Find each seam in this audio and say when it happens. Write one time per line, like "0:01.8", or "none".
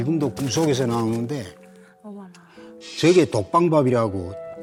none